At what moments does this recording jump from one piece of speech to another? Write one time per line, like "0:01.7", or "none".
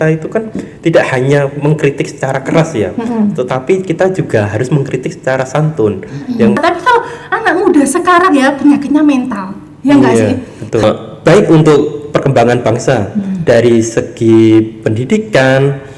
0:06.6
0:10.8

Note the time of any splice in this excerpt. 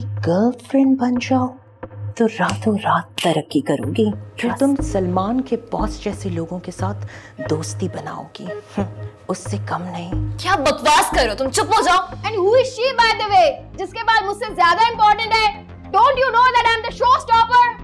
0:04.3
0:12.2

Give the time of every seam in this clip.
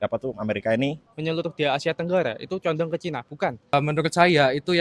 0:01.1
0:03.7

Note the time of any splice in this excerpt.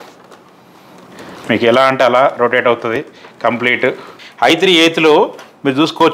0:04.2

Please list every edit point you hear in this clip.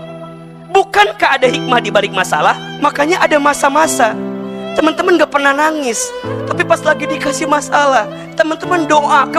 0:02.7

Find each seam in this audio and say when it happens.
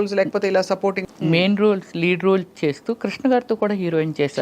0:01.0

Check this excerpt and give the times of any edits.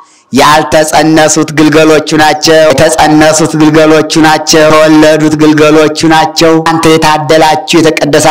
0:02.7
0:04.7
0:06.7

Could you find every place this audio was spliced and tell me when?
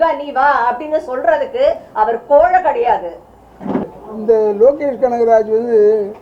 0:03.8

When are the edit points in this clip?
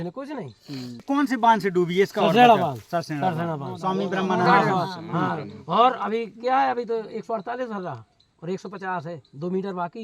0:01.0

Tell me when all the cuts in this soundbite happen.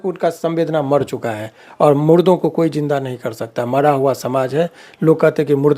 none

